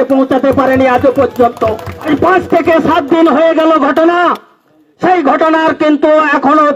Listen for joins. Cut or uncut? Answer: cut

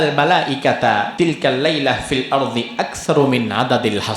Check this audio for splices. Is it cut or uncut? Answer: cut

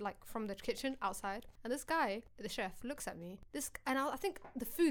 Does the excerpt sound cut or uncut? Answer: cut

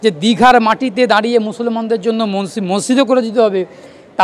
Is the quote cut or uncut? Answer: uncut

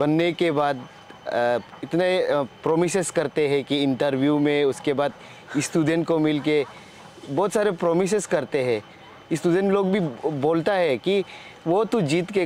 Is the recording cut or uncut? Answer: uncut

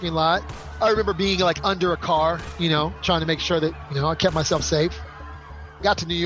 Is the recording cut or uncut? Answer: cut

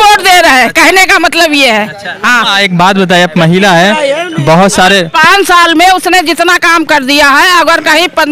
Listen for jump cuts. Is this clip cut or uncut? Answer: uncut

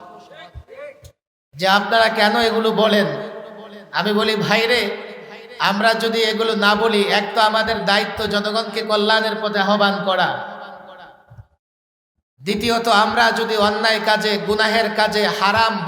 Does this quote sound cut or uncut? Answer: uncut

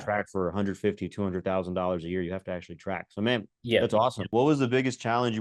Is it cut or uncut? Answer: cut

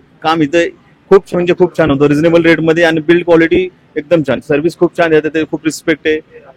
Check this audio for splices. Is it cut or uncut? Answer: uncut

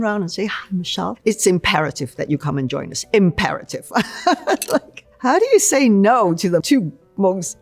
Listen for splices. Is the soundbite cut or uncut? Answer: cut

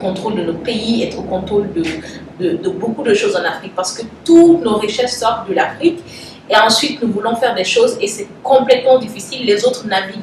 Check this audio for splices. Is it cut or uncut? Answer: uncut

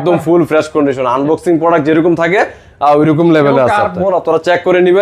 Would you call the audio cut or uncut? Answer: cut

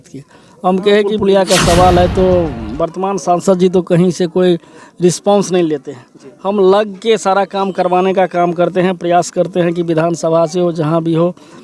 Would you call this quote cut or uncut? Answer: cut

